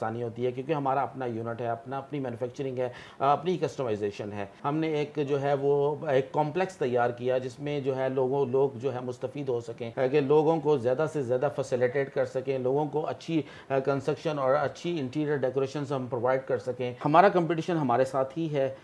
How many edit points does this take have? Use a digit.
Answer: 3